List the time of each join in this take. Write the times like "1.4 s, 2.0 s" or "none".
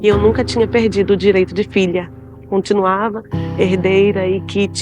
2.4 s